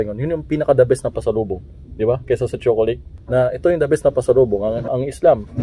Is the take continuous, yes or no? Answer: no